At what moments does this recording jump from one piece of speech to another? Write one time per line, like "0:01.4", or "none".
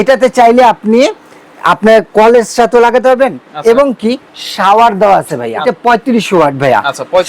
0:05.6